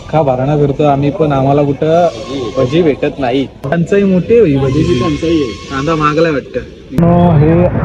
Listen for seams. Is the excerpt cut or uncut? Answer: cut